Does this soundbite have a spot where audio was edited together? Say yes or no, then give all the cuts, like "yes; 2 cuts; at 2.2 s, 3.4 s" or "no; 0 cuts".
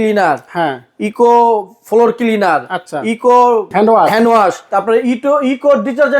yes; 2 cuts; at 3.7 s, 4.7 s